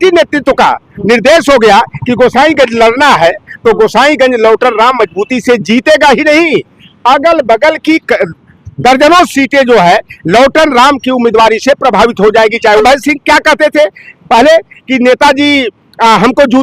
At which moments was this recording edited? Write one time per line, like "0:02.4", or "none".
0:12.8